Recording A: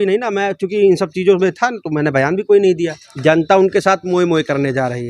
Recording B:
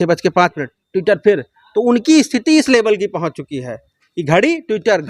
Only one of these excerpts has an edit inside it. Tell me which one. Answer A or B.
A